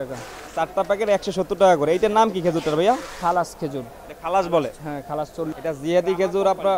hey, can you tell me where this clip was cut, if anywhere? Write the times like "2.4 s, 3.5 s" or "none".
5.5 s